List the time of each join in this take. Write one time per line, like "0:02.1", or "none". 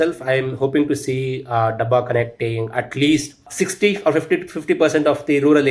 0:03.5